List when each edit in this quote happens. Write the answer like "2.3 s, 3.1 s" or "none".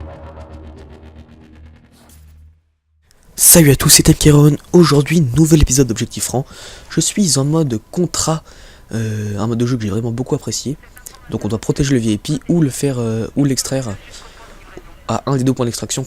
1.4 s